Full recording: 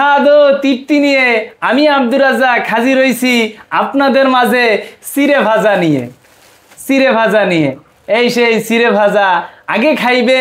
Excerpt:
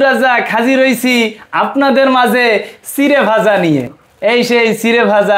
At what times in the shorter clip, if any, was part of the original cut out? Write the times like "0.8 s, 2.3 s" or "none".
4.0 s